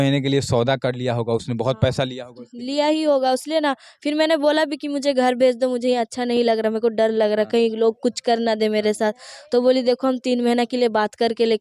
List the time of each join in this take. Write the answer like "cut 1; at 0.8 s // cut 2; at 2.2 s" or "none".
none